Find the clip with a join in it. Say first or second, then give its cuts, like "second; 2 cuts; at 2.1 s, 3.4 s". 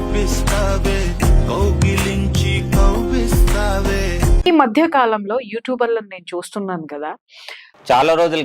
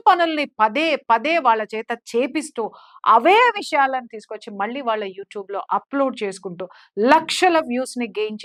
first; 1 cut; at 4.5 s